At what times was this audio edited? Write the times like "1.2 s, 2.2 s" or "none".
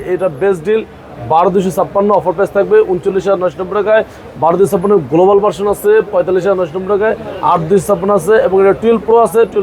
none